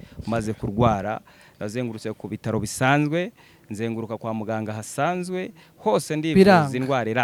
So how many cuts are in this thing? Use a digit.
0